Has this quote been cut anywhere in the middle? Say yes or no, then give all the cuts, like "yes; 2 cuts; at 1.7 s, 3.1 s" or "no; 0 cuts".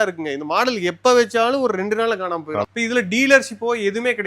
yes; 1 cut; at 2.6 s